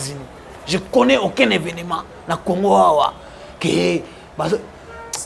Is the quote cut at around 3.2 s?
no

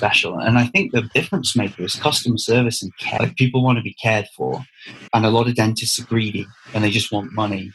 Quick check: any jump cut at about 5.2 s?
no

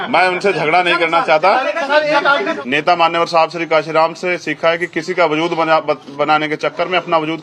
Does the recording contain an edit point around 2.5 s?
yes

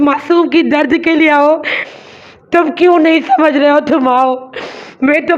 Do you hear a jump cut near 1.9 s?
yes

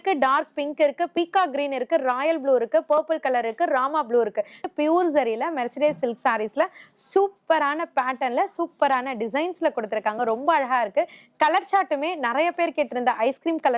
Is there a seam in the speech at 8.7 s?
no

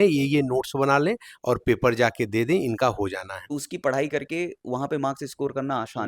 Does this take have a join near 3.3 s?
yes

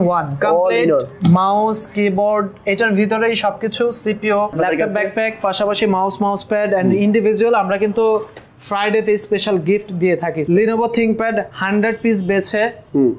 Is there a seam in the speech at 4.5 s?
yes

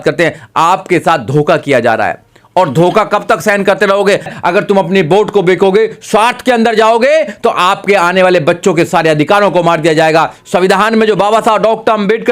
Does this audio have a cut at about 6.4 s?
no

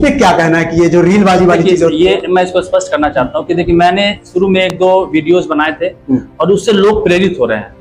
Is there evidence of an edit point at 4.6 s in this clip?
no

